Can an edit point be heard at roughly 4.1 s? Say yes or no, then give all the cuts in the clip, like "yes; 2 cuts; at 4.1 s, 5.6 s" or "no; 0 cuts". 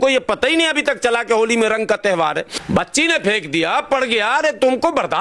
no; 1 cut; at 2.5 s